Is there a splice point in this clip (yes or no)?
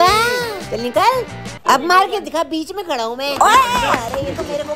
no